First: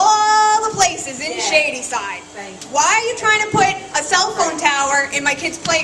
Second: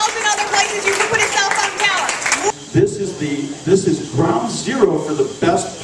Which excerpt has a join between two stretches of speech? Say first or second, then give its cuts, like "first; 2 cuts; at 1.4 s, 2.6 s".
second; 1 cut; at 2.5 s